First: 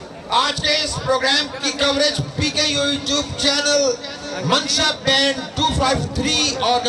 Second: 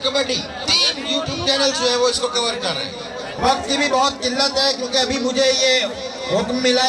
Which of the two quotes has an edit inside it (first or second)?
second